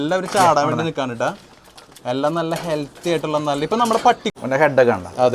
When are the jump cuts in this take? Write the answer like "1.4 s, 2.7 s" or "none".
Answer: 4.2 s